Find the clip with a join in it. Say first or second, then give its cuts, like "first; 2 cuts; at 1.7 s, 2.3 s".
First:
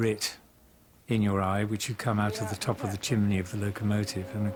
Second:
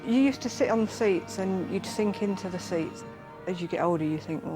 second; 1 cut; at 3.3 s